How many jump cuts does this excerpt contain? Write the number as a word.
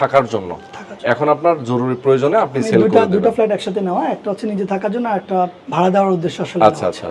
one